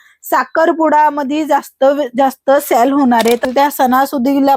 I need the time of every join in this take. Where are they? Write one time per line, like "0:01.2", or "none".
0:03.5